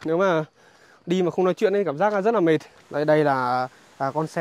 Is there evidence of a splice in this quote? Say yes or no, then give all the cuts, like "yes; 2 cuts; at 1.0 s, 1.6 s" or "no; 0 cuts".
yes; 1 cut; at 2.8 s